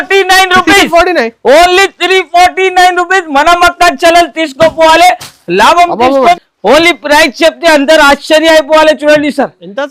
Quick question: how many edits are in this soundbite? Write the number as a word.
one